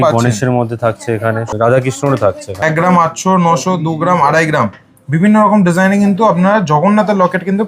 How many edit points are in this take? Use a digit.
2